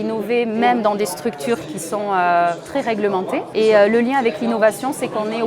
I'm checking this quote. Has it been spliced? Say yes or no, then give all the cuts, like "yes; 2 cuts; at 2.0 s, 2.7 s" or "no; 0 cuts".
yes; 2 cuts; at 1.7 s, 3.5 s